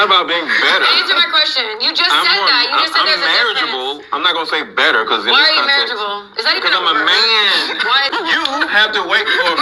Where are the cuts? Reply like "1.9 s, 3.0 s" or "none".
8.1 s